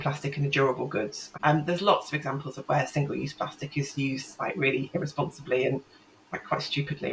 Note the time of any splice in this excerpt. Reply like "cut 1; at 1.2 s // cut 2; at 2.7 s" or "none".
cut 1; at 1.2 s